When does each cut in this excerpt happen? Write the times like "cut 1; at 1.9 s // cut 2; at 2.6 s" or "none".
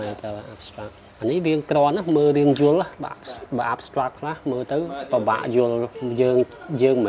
cut 1; at 1.0 s // cut 2; at 6.0 s

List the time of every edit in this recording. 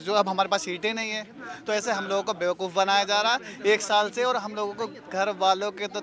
none

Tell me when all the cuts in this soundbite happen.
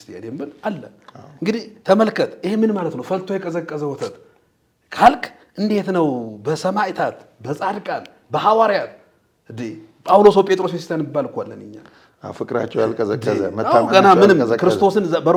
none

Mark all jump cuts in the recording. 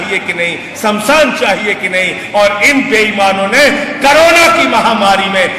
none

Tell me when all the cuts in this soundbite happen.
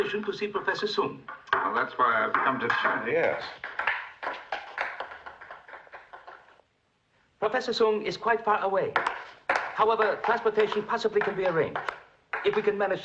none

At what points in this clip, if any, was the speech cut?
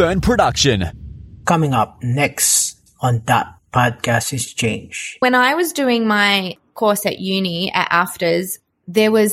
cut 1; at 5.2 s // cut 2; at 6.6 s

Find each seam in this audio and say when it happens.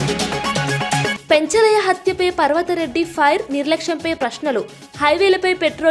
cut 1; at 1.1 s

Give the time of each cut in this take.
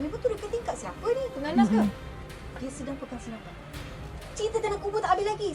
none

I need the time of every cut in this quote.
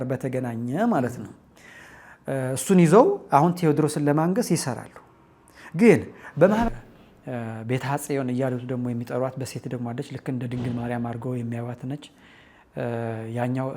cut 1; at 6.7 s

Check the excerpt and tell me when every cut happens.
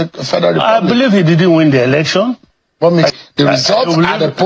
cut 1; at 3.1 s

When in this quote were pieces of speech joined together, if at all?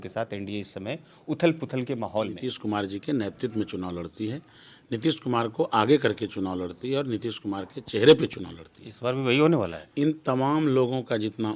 cut 1; at 2.5 s // cut 2; at 9.8 s

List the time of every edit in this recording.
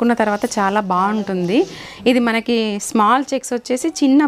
cut 1; at 1.8 s

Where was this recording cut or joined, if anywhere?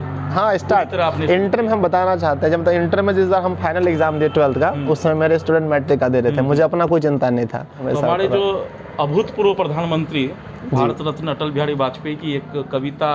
cut 1; at 7.8 s

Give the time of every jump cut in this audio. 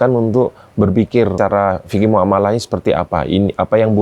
cut 1; at 1.3 s

